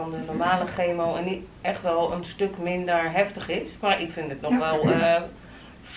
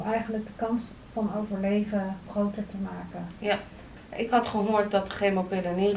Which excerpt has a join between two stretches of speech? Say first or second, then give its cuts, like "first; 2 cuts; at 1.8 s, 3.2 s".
second; 2 cuts; at 2.3 s, 3.9 s